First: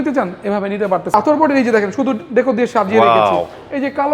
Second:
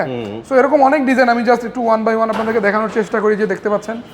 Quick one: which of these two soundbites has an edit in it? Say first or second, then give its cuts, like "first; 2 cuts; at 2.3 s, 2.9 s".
first; 1 cut; at 1.1 s